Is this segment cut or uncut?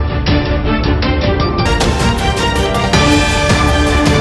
uncut